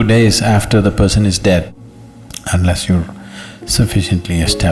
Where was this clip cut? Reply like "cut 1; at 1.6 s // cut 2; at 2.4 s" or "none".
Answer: cut 1; at 1.7 s